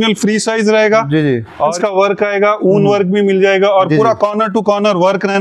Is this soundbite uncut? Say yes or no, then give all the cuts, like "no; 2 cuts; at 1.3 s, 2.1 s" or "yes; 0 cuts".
no; 1 cut; at 1.7 s